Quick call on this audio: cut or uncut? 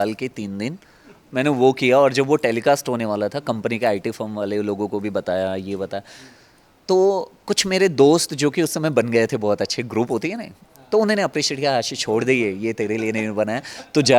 uncut